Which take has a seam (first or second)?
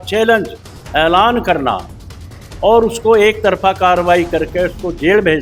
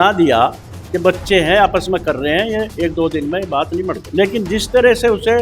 second